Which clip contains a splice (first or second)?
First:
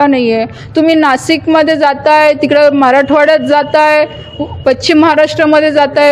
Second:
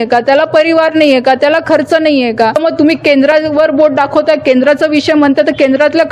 second